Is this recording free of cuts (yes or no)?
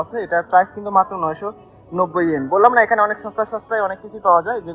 yes